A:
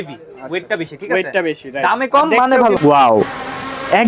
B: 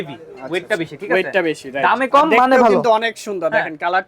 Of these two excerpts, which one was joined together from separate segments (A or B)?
A